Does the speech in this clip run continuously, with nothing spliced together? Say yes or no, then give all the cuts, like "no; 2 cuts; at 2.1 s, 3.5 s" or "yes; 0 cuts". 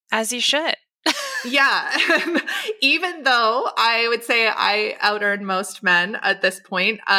yes; 0 cuts